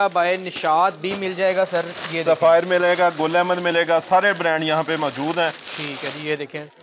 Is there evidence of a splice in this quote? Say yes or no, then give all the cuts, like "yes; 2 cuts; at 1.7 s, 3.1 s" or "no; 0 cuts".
no; 0 cuts